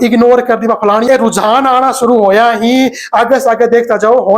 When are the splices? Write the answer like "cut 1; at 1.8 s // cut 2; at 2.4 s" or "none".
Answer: cut 1; at 1.1 s